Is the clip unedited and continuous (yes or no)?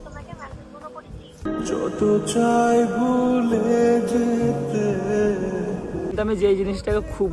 no